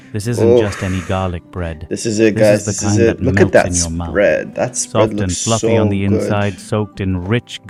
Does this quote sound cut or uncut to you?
uncut